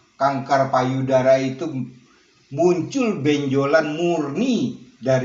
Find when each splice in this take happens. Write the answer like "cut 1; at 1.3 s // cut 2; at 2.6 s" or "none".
none